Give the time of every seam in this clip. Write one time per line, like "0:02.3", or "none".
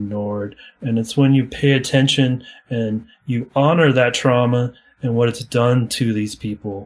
0:04.8